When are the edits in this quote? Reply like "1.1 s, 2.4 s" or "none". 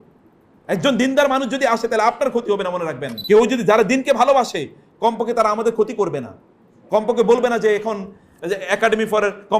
3.1 s